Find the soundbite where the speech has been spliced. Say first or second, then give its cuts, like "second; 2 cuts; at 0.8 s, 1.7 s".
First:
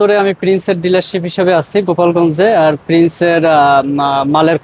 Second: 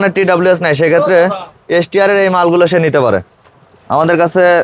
second; 1 cut; at 3.4 s